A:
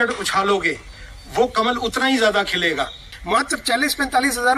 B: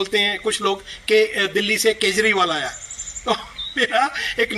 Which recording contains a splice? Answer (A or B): A